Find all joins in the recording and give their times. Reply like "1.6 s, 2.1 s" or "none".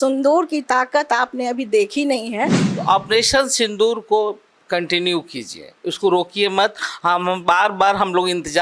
2.7 s